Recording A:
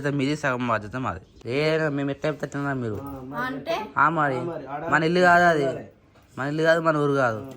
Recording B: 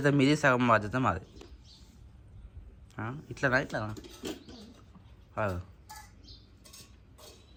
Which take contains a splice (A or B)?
A